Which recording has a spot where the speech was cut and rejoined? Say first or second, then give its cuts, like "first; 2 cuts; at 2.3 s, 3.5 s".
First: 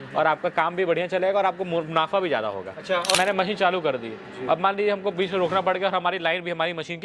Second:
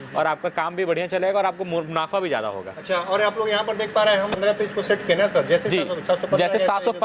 first; 1 cut; at 3.1 s